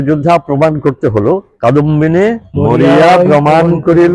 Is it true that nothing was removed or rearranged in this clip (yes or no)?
no